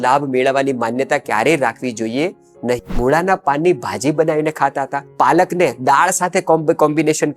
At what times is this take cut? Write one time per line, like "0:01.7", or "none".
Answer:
0:02.9
0:05.0